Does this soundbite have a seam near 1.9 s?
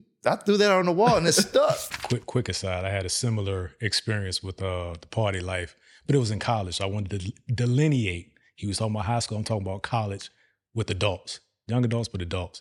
yes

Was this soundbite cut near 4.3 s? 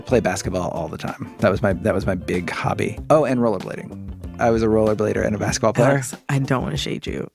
yes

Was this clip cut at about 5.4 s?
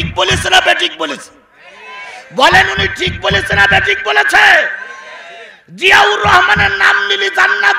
no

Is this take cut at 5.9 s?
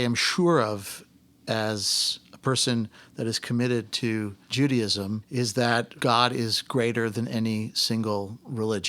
yes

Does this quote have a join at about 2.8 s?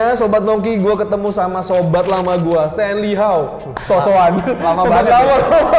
no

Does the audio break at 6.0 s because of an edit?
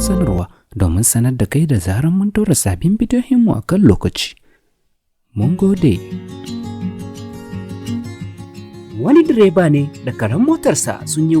yes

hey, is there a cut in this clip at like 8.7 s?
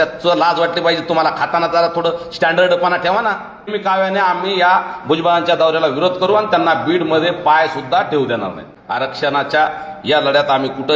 yes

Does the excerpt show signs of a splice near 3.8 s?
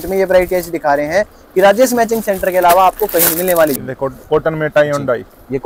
yes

